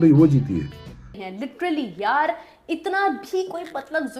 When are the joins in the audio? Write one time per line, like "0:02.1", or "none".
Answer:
0:01.1